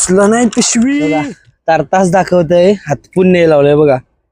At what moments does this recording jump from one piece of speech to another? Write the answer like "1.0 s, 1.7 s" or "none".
1.2 s